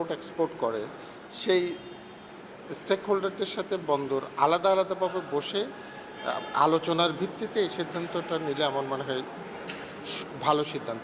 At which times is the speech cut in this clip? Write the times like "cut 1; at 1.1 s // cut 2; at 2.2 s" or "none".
none